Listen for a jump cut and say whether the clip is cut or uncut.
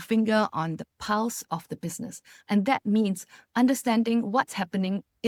uncut